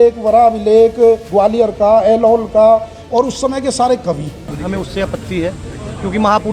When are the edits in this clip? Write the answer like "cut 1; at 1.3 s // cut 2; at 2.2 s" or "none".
cut 1; at 4.5 s